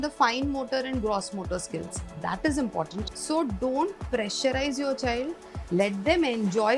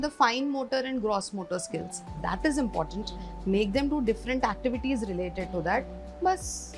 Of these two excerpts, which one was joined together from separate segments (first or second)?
first